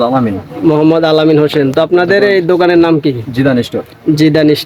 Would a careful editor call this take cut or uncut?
uncut